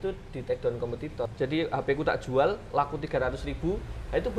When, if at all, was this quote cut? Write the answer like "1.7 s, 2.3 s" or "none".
1.3 s